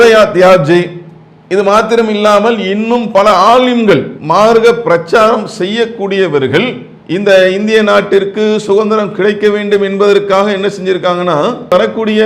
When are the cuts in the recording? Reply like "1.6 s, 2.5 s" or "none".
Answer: none